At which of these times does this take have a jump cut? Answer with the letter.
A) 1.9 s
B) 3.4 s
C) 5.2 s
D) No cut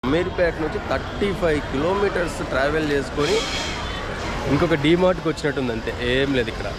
D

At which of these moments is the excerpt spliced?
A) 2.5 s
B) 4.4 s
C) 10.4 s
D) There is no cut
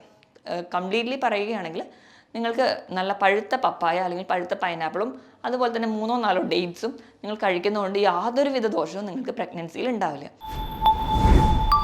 C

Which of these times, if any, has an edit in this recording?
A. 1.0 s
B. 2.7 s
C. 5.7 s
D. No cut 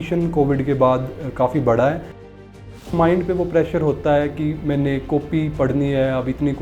B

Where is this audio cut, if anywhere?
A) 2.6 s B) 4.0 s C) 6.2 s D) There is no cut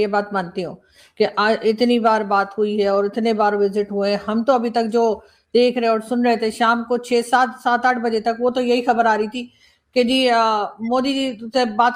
D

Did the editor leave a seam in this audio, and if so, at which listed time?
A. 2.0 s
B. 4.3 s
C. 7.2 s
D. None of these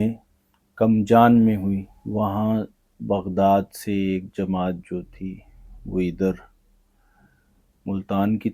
A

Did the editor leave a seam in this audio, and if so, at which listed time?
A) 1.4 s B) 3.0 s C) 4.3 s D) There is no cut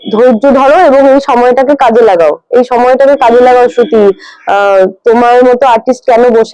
D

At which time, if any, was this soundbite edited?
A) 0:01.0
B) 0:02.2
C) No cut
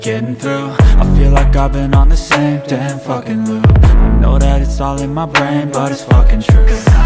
A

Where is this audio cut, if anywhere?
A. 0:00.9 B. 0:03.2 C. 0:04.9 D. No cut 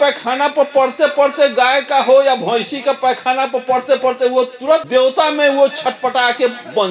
C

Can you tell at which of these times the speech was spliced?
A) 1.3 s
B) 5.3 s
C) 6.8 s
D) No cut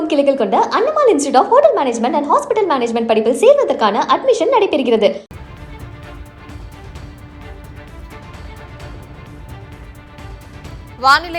B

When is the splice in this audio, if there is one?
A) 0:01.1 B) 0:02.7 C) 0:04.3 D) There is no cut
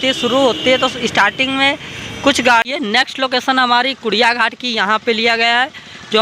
B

